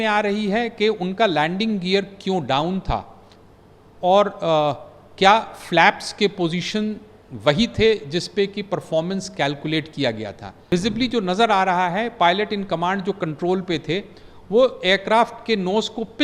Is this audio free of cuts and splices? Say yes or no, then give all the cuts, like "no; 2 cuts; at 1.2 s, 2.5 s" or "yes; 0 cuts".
no; 1 cut; at 10.7 s